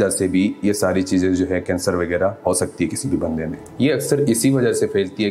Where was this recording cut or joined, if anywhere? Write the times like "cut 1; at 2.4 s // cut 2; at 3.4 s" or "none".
cut 1; at 3.6 s